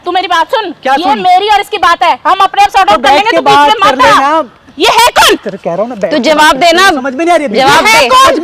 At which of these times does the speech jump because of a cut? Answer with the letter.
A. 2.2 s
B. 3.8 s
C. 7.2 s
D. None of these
D